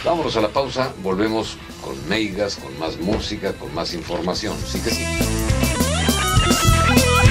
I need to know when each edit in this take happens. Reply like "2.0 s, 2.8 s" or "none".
4.8 s